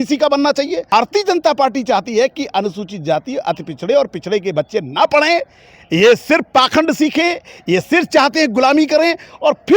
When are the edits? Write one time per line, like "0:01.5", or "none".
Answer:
0:00.9